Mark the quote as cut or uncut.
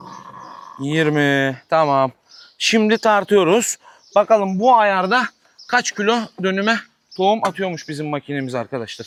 uncut